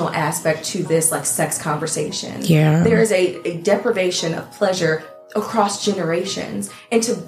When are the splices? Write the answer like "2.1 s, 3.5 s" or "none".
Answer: none